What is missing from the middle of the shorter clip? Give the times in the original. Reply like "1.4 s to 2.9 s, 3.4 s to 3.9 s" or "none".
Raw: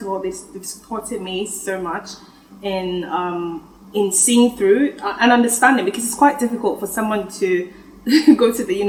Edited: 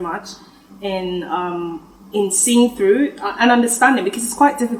none